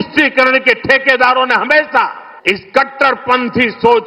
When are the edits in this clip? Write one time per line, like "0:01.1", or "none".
0:02.3